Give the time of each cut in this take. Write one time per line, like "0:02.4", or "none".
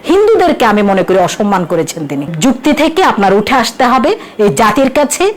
0:02.3